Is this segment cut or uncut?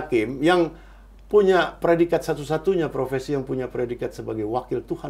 uncut